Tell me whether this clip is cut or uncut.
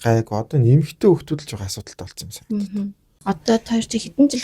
cut